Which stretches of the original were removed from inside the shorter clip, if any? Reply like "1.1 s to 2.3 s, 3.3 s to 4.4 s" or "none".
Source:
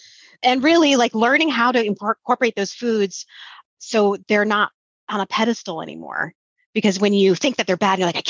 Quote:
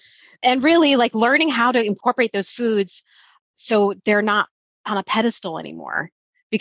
2.0 s to 2.2 s